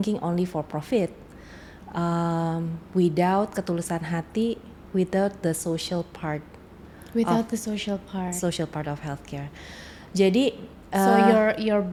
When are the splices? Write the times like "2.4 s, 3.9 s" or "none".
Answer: none